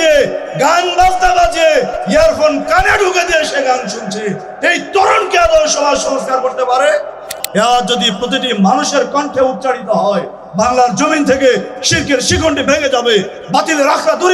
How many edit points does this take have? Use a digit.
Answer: 1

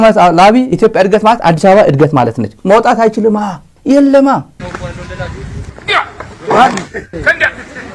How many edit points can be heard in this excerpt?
0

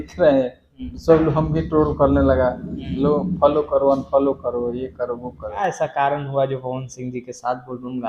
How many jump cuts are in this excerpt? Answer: 1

